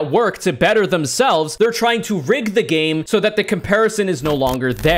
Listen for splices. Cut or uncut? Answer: uncut